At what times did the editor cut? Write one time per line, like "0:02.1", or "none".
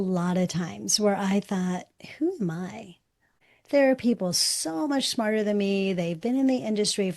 0:03.4